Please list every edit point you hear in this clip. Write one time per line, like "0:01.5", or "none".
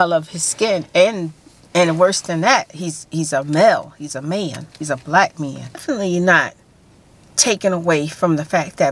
0:05.8

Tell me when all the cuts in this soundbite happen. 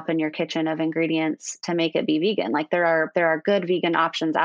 none

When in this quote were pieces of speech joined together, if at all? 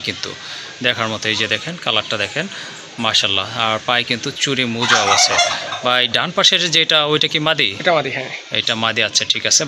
none

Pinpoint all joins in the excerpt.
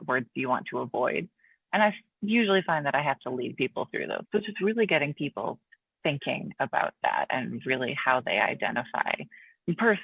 0:04.2

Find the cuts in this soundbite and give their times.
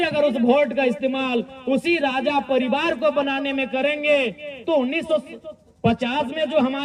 none

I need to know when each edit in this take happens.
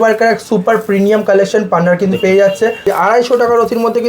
0:02.8

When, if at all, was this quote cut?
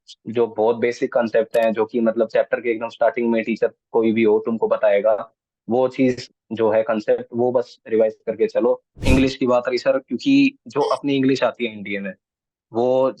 0:09.0

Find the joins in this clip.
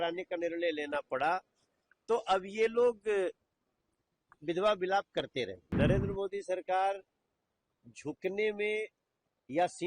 0:05.6

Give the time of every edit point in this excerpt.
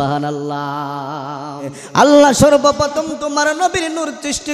0:01.8

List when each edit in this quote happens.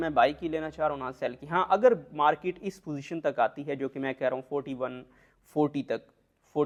none

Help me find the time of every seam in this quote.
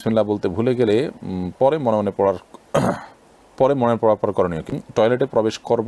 0:04.7

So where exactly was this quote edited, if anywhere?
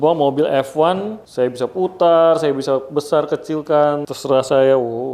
0:01.2
0:04.1

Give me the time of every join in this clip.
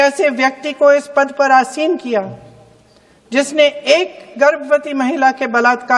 none

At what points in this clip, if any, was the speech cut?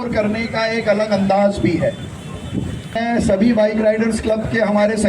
0:03.0

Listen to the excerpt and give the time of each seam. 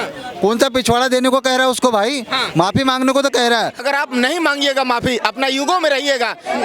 0:03.8

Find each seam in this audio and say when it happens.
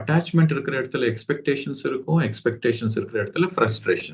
none

